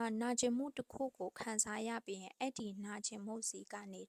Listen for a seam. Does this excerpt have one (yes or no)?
no